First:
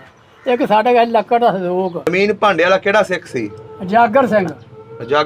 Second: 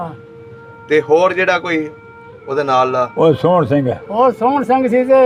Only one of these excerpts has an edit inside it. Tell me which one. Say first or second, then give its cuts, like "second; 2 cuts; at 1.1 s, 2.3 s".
first; 1 cut; at 2.1 s